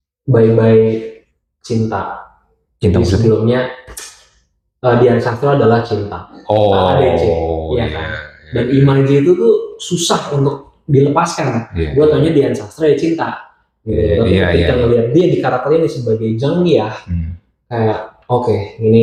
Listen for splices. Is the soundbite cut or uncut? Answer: uncut